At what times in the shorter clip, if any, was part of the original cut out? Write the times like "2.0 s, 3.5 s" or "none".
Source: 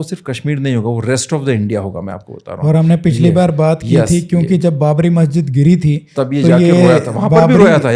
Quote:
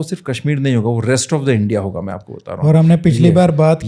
none